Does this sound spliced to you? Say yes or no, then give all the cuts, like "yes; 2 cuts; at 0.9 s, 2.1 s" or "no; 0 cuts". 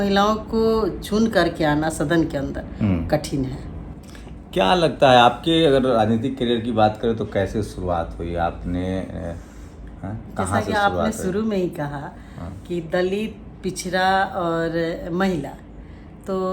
no; 0 cuts